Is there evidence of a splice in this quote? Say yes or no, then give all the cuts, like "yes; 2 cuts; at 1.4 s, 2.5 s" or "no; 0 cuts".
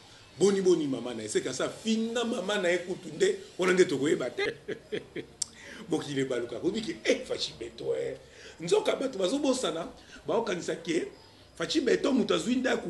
yes; 1 cut; at 4.4 s